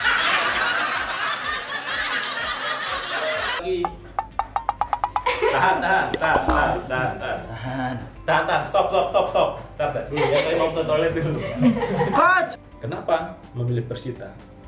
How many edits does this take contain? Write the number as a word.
two